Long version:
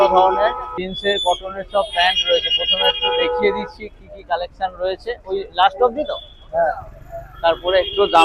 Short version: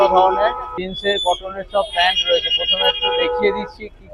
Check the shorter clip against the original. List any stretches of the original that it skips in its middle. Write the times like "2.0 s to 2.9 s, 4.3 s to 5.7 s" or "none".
none

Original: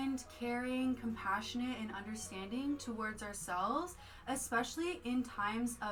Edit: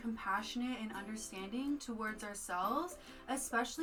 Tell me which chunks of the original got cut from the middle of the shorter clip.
none

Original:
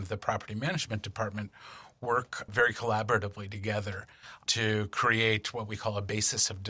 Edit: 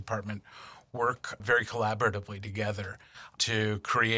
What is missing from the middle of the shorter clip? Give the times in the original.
none

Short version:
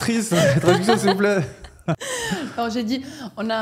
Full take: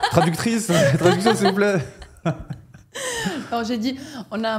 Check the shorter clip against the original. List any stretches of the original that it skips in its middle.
2.4 s to 3.0 s

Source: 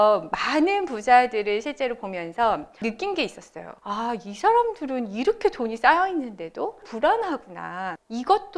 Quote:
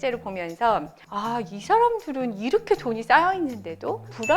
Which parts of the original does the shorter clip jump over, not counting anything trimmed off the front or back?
2.7 s to 3.7 s

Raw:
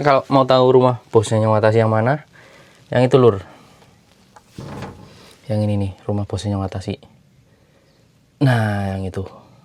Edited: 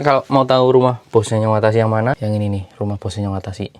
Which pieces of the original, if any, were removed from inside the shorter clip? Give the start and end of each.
2.2 s to 5.5 s

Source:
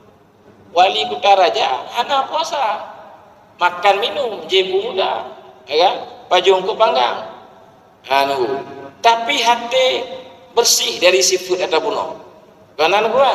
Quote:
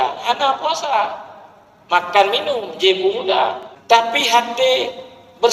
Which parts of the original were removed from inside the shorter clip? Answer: 5.4 s to 8.8 s

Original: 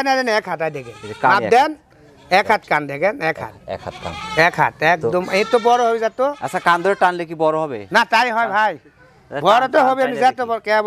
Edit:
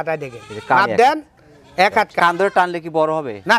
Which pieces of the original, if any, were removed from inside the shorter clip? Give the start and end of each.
2.7 s to 6.6 s

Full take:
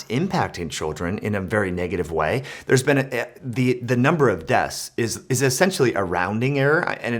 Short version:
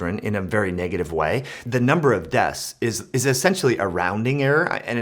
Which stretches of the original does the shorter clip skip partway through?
2.6 s to 3.8 s

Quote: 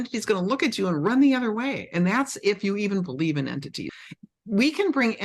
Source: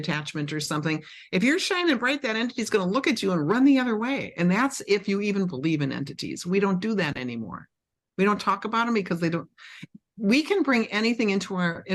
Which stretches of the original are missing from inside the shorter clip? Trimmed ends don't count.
6.3 s to 9.6 s

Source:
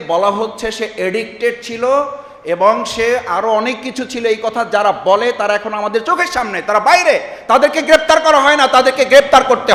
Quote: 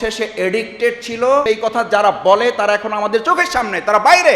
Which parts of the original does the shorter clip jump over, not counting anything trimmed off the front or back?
2.1 s to 4.3 s

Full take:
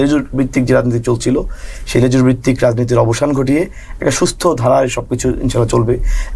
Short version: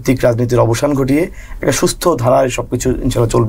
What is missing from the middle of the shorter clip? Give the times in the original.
none

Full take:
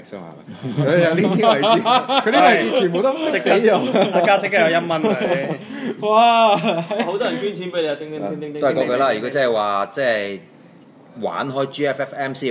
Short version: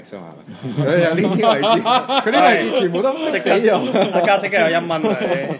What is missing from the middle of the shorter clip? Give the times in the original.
none

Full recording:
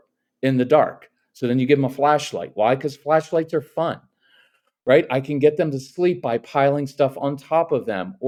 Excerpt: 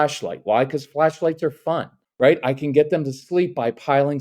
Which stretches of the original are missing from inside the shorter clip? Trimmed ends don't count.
4.1 s to 4.6 s

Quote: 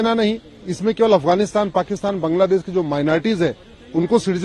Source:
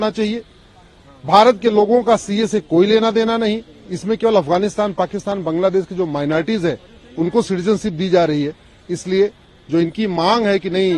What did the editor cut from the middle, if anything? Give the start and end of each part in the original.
none

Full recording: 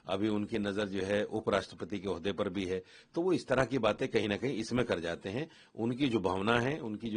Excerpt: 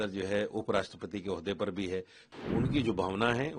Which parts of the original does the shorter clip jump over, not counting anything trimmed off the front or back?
3.0 s to 5.5 s

